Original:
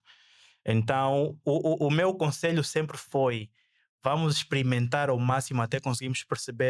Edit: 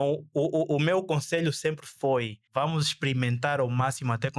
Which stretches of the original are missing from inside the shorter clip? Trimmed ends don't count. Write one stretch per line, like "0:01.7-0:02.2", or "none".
0:03.5-0:03.9